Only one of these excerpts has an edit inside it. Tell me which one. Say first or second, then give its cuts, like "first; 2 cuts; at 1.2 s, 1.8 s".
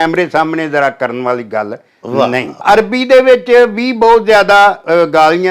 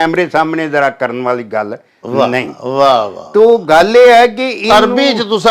first; 1 cut; at 2.6 s